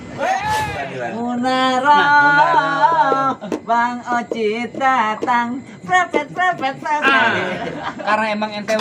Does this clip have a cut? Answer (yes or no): yes